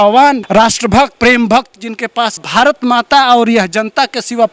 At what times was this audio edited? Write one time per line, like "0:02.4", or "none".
0:00.9
0:02.5